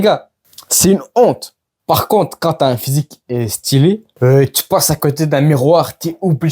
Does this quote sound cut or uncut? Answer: cut